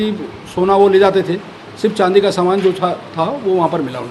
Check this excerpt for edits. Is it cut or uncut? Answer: uncut